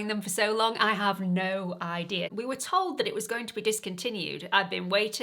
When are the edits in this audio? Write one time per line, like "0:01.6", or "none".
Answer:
0:02.3